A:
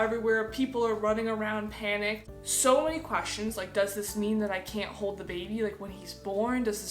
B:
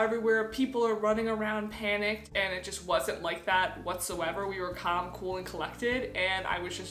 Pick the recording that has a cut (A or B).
A